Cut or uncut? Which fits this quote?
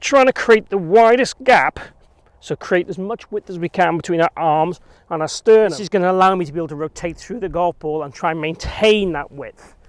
cut